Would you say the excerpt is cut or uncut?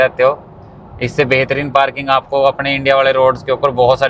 uncut